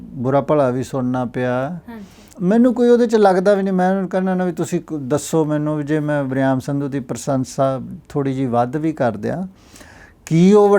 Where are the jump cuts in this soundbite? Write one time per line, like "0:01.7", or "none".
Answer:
0:02.3